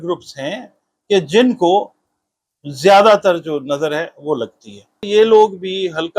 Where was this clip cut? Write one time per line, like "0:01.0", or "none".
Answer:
0:05.0